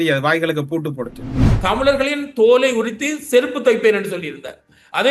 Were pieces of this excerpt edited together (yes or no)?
yes